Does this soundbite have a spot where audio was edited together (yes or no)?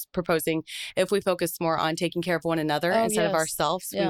no